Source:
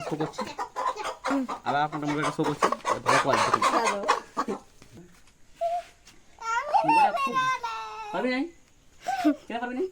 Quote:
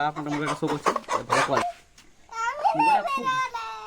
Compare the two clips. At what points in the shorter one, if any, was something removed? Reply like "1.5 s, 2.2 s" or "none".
1.6 s